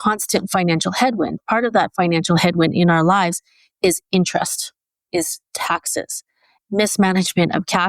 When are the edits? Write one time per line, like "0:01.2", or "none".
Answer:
0:01.4
0:05.1
0:06.6